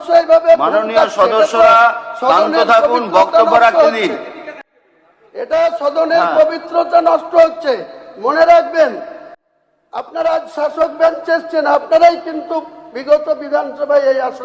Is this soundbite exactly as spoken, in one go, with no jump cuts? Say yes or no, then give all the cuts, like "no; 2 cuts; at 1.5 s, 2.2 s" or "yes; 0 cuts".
yes; 0 cuts